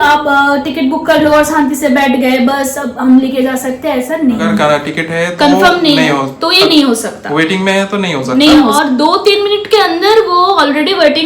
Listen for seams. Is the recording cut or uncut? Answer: cut